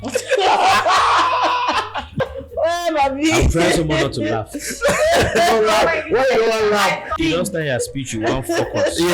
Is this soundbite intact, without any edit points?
no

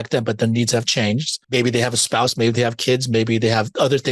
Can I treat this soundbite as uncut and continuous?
no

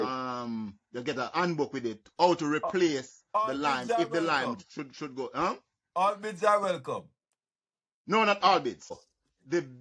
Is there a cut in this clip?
yes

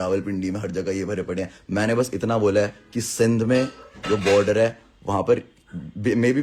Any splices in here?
no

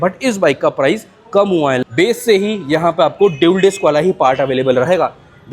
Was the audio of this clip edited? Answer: yes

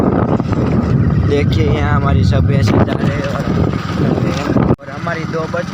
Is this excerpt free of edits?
no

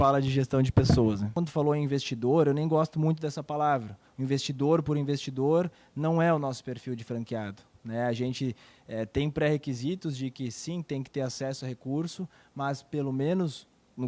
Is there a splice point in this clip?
yes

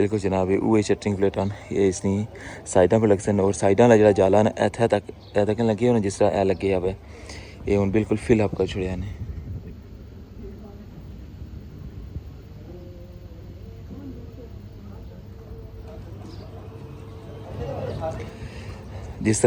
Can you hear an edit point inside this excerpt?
yes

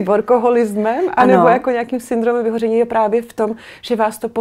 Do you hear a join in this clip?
no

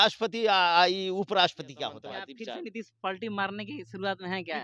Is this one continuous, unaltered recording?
no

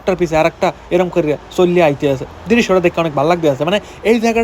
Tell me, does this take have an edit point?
no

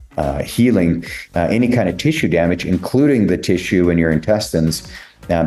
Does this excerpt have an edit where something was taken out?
no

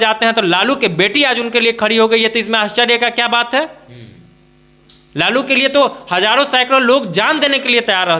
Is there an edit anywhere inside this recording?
no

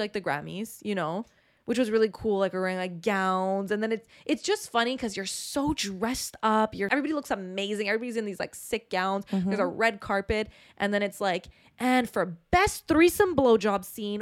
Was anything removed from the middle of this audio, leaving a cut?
yes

